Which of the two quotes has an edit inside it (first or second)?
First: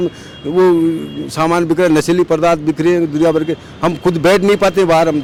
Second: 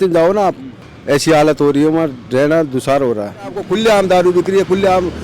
second